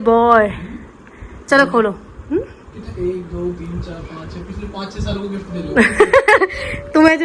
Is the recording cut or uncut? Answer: uncut